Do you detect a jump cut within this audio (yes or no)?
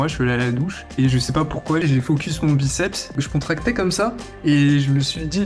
yes